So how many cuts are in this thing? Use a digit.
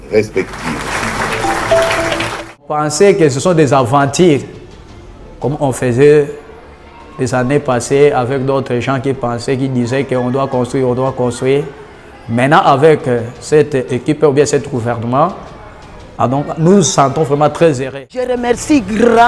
2